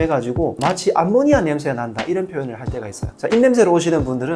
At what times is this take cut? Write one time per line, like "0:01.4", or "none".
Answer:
0:03.0